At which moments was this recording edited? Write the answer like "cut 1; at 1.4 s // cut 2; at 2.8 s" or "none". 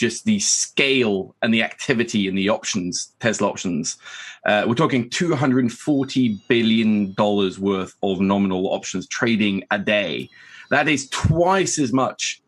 cut 1; at 10.3 s